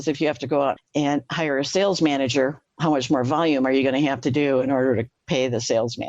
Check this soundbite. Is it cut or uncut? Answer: cut